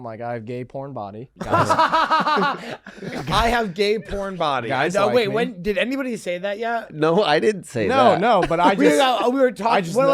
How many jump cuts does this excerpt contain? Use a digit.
1